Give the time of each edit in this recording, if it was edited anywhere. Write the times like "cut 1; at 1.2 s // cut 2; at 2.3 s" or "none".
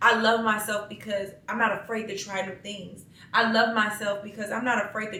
none